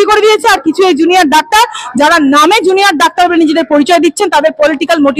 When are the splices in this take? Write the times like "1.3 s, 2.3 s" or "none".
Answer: none